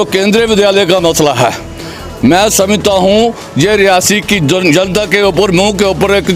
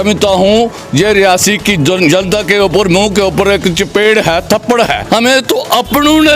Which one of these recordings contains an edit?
second; 1 cut; at 5.0 s

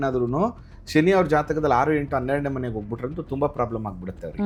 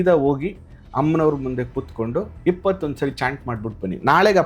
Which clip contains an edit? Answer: second; 1 cut; at 2.3 s

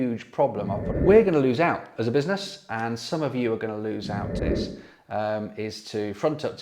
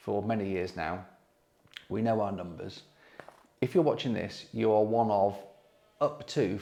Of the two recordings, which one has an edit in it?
first; 2 cuts; at 0.9 s, 4.4 s

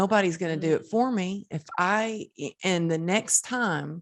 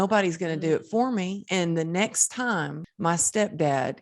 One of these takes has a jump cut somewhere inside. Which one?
second; 2 cuts; at 1.4 s, 2.8 s

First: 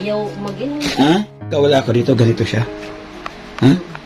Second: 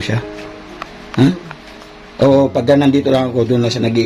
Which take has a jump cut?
first; 1 cut; at 1.5 s

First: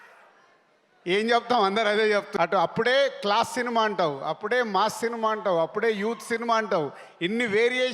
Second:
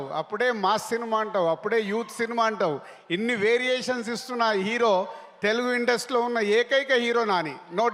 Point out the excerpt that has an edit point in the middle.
first; 1 cut; at 2.3 s

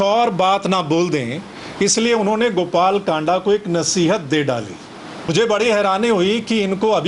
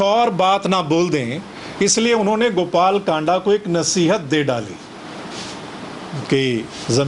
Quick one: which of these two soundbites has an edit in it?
first; 1 cut; at 5.3 s

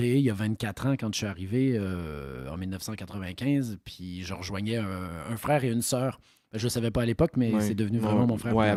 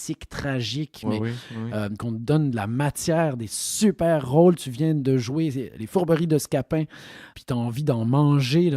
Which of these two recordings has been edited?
second; 3 cuts; at 1.0 s, 2.0 s, 7.3 s

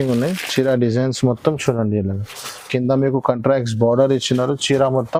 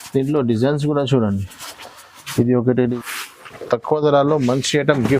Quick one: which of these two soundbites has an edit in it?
second; 1 cut; at 3.0 s

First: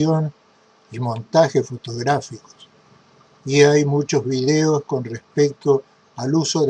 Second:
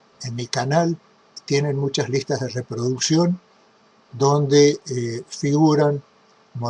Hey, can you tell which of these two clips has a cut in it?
first; 1 cut; at 5.5 s

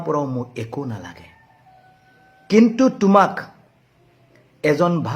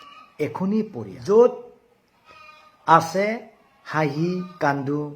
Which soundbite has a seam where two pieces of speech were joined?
second; 1 cut; at 1.1 s

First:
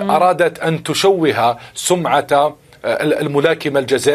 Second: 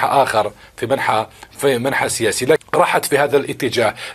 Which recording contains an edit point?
second; 1 cut; at 2.6 s

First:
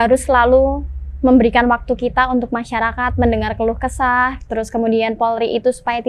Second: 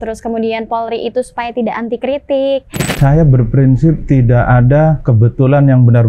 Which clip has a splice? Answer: second; 3 cuts; at 2.9 s, 4.0 s, 5.0 s

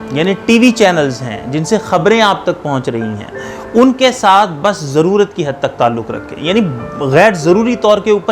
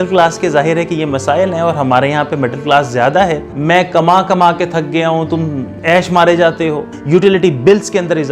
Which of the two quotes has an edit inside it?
second; 2 cuts; at 3.5 s, 6.9 s

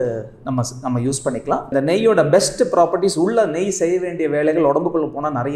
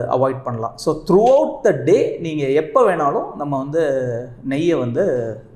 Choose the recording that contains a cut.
first; 1 cut; at 1.7 s

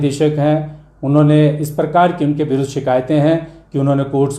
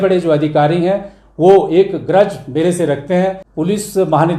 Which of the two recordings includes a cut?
second; 1 cut; at 3.5 s

